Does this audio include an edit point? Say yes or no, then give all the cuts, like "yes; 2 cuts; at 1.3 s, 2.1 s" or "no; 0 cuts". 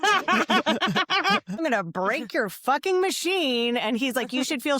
yes; 1 cut; at 1.6 s